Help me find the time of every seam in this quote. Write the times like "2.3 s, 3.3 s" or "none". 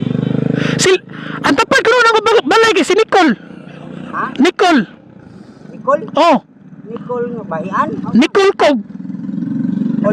none